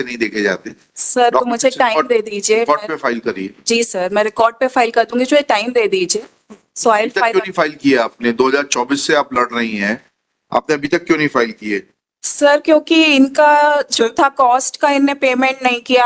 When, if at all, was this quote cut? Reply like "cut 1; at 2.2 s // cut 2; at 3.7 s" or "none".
none